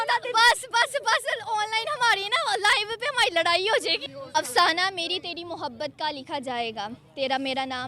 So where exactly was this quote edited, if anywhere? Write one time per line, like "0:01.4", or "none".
0:04.0